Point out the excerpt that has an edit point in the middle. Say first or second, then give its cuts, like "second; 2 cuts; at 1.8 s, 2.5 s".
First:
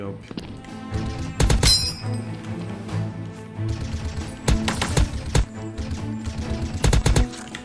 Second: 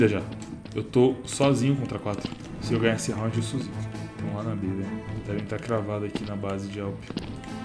second; 1 cut; at 2.5 s